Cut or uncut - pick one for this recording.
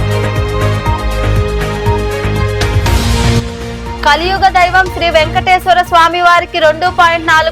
uncut